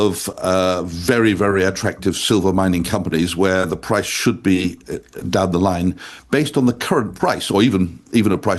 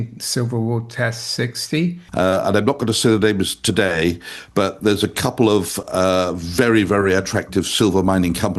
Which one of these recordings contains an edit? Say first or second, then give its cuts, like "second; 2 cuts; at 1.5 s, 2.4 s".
second; 1 cut; at 2.0 s